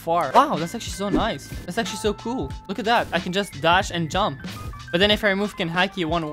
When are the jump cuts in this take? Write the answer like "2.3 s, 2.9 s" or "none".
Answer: none

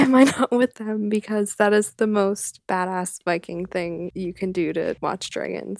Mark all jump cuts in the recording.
2.5 s, 4.1 s, 5.0 s

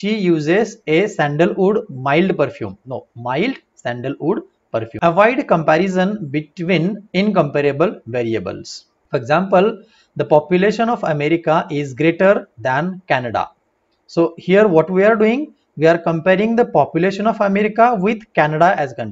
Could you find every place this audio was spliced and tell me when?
4.9 s

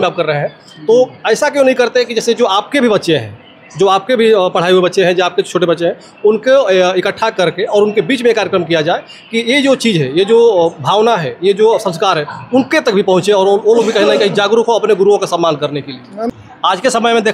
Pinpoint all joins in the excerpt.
16.3 s

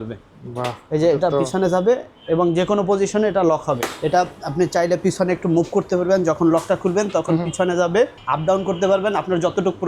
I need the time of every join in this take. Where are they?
3.9 s, 8.2 s

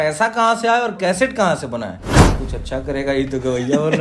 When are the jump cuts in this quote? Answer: 2.2 s

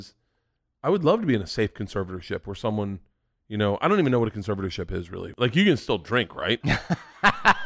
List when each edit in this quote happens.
5.2 s, 6.6 s

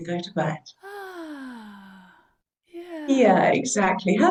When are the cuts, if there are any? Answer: none

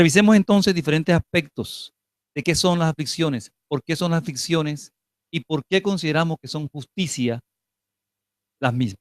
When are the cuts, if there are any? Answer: 7.8 s

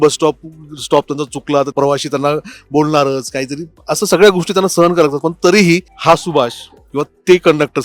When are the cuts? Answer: 1.7 s, 5.9 s

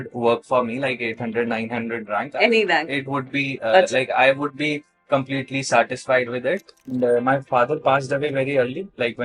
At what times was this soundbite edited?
6.9 s

